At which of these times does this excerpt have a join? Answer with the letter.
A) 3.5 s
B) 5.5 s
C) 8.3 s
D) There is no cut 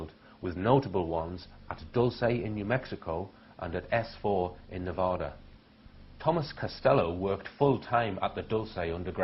C